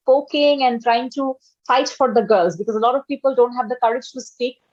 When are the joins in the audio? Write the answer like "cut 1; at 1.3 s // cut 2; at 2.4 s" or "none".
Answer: none

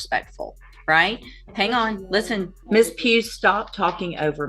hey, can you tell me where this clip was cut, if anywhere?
cut 1; at 2.6 s

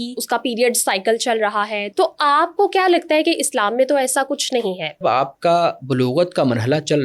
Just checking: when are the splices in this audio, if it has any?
cut 1; at 1.9 s // cut 2; at 5.0 s

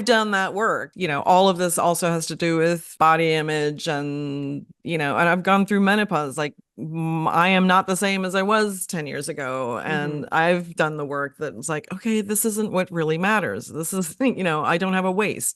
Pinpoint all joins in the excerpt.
cut 1; at 0.9 s // cut 2; at 2.9 s

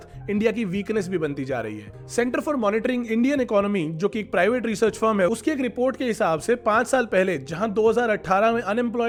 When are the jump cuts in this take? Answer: none

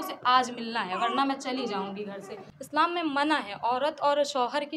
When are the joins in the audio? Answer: cut 1; at 2.5 s

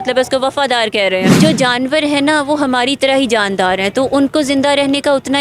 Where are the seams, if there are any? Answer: cut 1; at 1.3 s

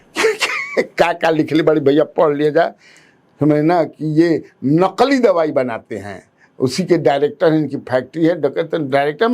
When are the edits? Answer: none

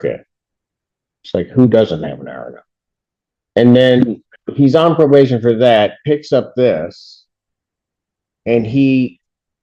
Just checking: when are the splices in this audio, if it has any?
none

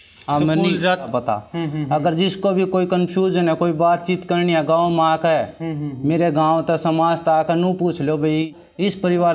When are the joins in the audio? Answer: cut 1; at 1.1 s // cut 2; at 8.5 s

